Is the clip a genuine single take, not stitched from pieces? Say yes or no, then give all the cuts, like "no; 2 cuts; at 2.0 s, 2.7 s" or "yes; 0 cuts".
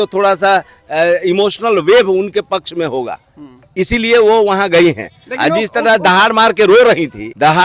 yes; 0 cuts